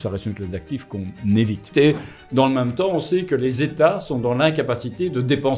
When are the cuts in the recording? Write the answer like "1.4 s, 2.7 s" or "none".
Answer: 1.7 s